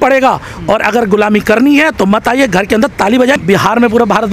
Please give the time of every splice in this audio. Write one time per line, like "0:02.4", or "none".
0:03.4